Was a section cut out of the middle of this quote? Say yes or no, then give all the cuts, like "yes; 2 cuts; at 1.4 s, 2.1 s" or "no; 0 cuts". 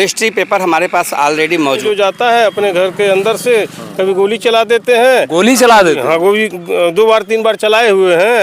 yes; 1 cut; at 1.8 s